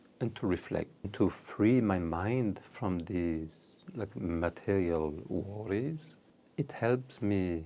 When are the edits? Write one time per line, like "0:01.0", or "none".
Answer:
0:01.1